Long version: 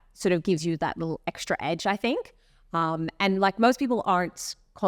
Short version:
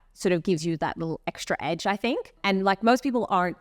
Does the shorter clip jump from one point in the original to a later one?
yes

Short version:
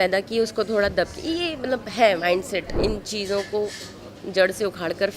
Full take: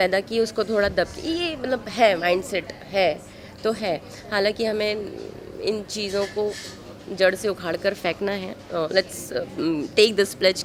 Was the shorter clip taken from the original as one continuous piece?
no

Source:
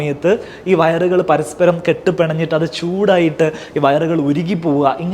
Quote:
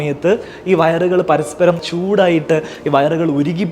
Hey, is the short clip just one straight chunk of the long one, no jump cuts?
no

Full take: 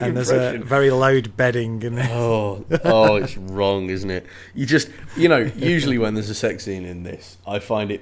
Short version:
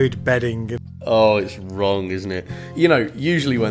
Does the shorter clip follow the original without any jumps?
no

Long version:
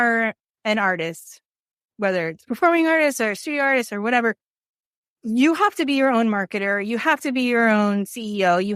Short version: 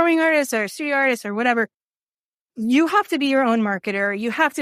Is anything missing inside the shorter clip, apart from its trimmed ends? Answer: no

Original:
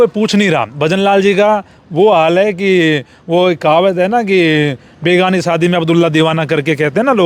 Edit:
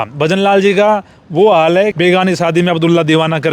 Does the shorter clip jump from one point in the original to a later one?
yes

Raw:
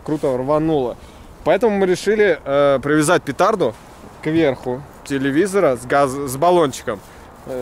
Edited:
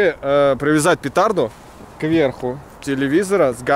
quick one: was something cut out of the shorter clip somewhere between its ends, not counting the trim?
no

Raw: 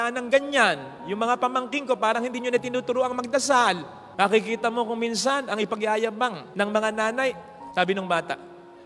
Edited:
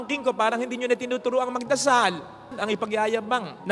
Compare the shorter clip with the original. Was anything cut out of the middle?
yes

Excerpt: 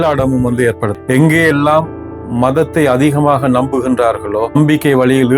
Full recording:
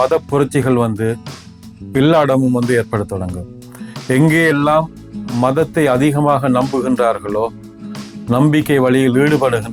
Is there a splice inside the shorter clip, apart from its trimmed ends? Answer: yes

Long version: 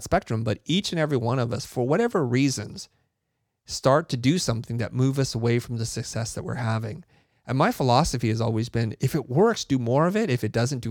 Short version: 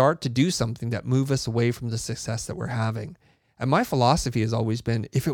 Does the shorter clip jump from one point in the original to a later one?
no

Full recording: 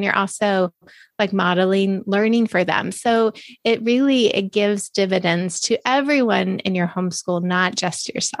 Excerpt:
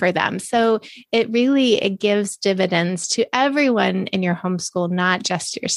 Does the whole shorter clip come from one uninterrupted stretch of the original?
yes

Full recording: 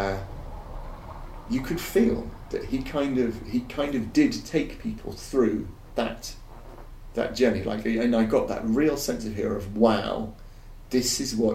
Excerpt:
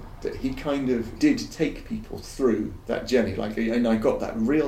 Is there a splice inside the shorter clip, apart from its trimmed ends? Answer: yes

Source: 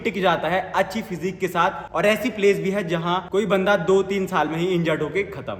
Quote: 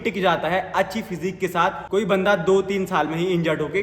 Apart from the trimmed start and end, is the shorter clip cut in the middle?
yes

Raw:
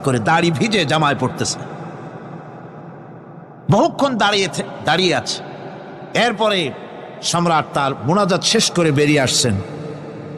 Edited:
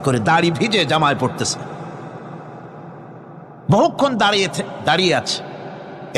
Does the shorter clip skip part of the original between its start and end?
no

